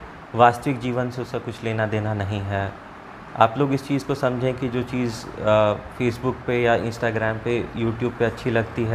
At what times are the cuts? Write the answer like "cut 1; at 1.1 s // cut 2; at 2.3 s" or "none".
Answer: none